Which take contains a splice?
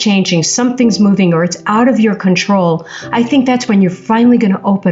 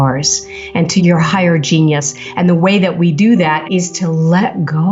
second; 2 cuts; at 1.0 s, 3.6 s

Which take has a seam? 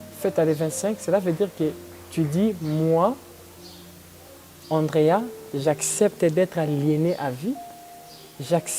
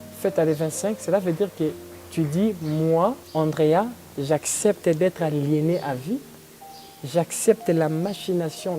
second; 1 cut; at 3.2 s

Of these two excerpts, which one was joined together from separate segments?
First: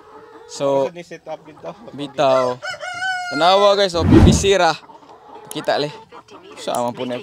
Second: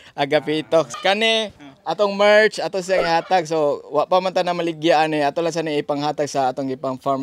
second; 1 cut; at 0.9 s

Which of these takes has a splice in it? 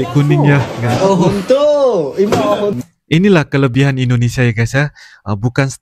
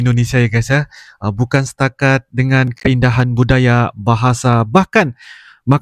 first; 1 cut; at 2.8 s

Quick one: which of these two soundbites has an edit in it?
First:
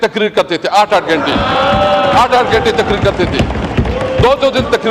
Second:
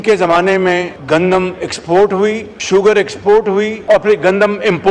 second; 3 cuts; at 0.9 s, 2.5 s, 3.8 s

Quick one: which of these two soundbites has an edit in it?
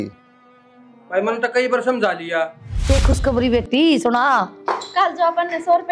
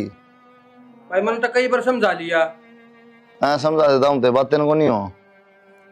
first; 1 cut; at 2.9 s

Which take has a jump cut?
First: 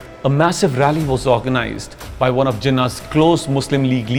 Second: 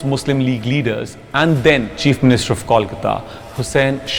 second; 1 cut; at 1.9 s

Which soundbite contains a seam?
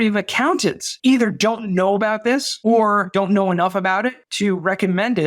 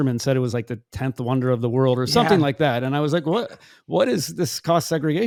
first; 4 cuts; at 0.9 s, 2.5 s, 3.1 s, 4.3 s

